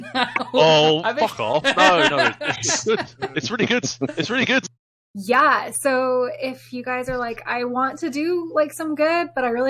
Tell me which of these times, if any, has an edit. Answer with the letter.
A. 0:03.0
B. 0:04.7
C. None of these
B